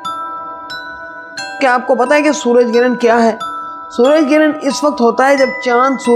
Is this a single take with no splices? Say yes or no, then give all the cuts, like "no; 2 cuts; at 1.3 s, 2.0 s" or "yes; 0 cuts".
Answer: no; 1 cut; at 1.3 s